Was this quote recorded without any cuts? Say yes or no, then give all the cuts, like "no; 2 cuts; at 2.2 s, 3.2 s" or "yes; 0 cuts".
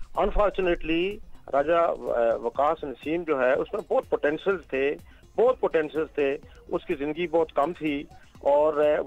yes; 0 cuts